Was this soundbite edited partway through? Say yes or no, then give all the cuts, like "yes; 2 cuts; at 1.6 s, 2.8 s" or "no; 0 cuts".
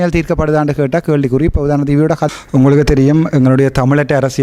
yes; 1 cut; at 2.3 s